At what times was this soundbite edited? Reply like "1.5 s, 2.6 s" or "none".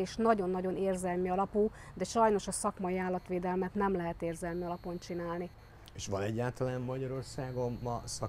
none